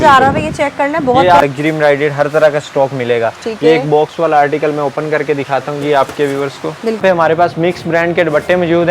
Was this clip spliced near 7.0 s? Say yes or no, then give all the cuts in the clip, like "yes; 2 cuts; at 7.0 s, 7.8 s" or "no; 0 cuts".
yes; 2 cuts; at 1.4 s, 7.0 s